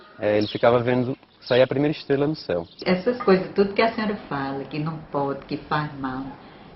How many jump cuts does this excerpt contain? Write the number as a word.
one